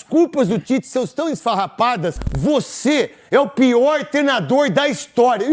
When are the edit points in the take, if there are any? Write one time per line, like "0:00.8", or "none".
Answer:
0:02.3